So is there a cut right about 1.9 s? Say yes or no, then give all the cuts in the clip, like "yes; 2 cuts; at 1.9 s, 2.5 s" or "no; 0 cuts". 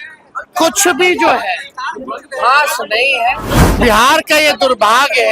no; 1 cut; at 3.8 s